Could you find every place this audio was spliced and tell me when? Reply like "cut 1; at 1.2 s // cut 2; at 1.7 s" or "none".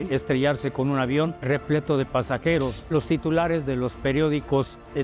cut 1; at 1.4 s // cut 2; at 2.8 s

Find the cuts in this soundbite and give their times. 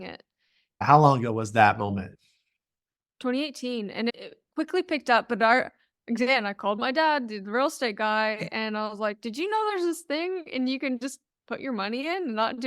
cut 1; at 2.1 s

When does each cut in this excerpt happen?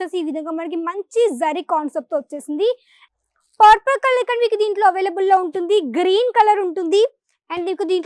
cut 1; at 3.0 s

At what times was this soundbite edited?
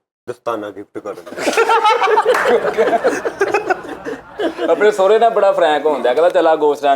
none

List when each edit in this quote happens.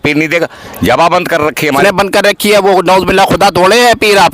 cut 1; at 1.8 s

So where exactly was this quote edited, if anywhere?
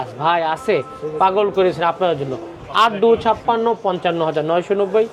none

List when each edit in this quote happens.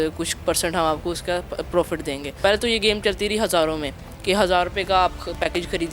cut 1; at 2.3 s

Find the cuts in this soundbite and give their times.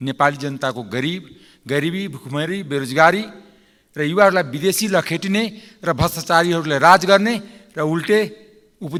none

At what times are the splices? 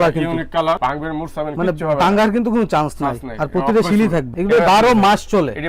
cut 1; at 0.8 s // cut 2; at 4.3 s

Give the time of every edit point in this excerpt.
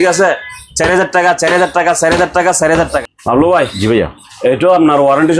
cut 1; at 3.1 s

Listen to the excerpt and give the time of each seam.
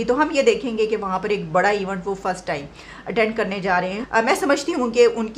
cut 1; at 4.0 s

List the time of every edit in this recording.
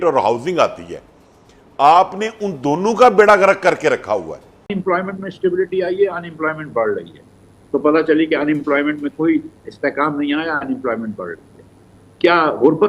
cut 1; at 4.7 s

